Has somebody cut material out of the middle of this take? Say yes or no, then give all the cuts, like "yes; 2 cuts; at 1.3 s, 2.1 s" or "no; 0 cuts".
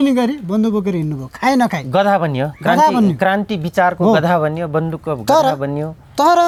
no; 0 cuts